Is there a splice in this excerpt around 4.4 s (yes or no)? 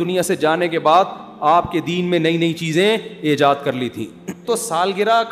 yes